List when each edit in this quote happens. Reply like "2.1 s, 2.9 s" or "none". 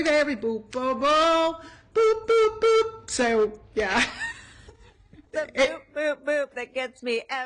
5.6 s